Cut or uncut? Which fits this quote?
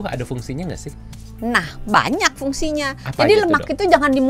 uncut